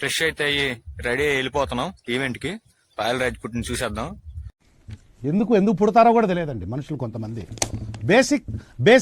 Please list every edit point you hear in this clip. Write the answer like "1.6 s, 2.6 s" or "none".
none